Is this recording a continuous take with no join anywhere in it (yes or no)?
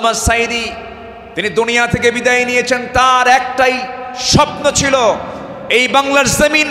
yes